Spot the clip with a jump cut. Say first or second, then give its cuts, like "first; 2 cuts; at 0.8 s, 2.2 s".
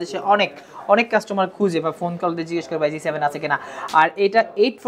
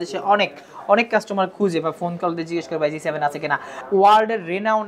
second; 1 cut; at 3.7 s